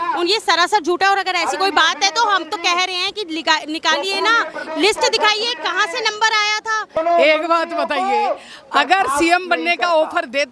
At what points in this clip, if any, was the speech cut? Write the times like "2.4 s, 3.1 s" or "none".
7.0 s